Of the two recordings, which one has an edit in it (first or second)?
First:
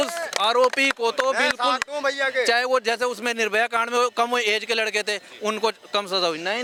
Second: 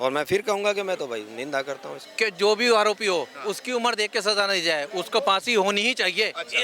second